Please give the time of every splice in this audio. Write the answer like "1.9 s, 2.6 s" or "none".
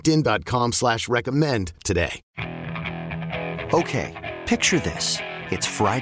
2.2 s